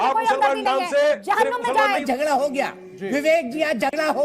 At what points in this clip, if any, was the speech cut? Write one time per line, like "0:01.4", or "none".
0:02.0